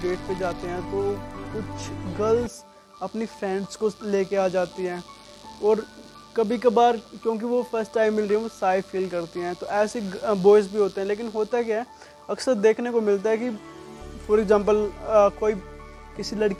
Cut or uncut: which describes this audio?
uncut